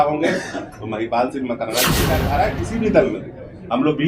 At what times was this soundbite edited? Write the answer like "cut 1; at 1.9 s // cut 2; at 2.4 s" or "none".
cut 1; at 2.2 s